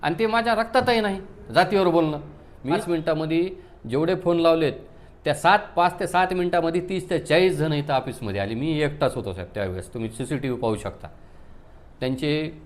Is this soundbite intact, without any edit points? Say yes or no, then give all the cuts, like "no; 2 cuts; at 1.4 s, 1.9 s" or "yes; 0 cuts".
no; 1 cut; at 2.8 s